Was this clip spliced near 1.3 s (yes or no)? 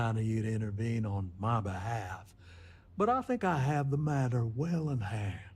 no